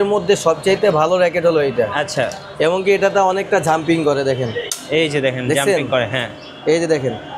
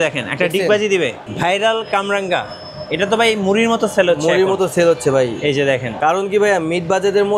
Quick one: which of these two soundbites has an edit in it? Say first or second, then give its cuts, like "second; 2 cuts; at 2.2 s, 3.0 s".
second; 2 cuts; at 1.3 s, 5.9 s